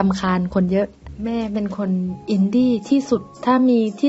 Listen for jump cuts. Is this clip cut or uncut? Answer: cut